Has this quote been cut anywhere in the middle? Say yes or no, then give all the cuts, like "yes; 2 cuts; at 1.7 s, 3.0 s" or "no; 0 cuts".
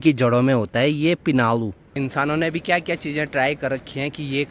yes; 1 cut; at 1.8 s